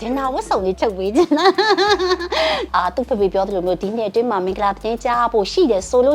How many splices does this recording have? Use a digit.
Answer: 1